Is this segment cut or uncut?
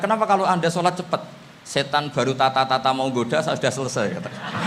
uncut